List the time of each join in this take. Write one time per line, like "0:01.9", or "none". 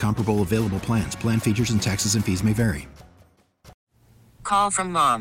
0:03.8